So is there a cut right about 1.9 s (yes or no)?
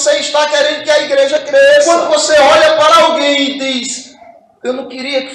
yes